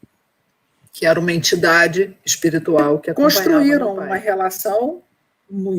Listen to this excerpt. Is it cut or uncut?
cut